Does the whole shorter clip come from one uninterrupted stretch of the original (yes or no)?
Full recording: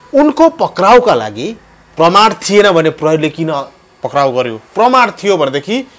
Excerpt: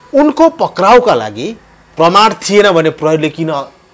yes